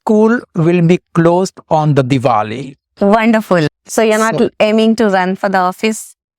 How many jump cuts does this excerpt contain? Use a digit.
1